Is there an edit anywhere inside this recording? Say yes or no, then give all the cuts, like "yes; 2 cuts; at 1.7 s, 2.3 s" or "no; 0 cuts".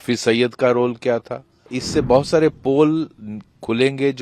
yes; 1 cut; at 1.8 s